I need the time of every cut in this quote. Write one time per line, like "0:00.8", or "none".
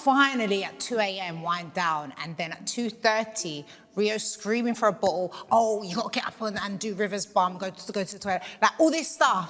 none